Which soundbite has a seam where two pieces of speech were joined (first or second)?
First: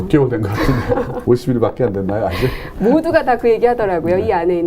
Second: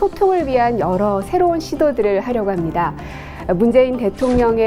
first